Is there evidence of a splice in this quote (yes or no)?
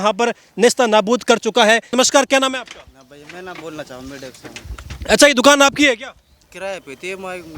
yes